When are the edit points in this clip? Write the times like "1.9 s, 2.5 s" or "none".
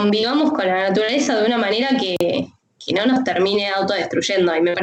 2.1 s